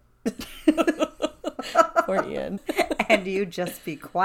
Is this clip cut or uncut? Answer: cut